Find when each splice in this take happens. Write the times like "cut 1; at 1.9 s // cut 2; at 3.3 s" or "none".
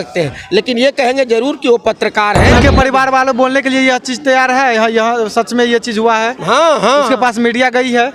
cut 1; at 2.5 s